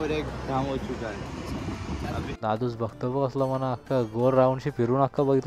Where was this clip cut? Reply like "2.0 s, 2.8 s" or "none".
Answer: 2.3 s